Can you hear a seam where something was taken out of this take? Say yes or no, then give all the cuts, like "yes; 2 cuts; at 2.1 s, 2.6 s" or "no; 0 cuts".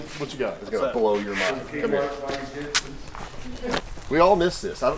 yes; 1 cut; at 3.8 s